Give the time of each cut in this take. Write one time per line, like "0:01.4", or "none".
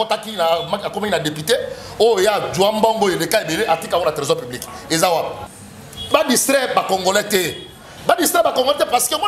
0:05.5